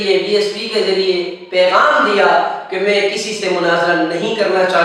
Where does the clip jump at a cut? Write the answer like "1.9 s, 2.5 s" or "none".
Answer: none